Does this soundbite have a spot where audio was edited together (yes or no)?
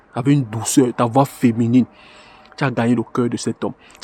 no